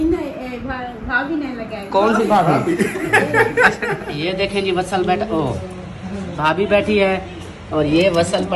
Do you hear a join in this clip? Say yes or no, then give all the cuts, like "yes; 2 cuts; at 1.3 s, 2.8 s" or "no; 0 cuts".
yes; 1 cut; at 4.1 s